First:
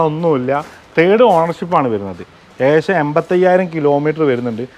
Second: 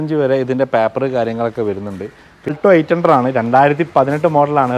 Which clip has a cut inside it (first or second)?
second